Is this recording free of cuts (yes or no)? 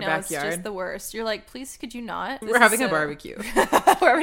no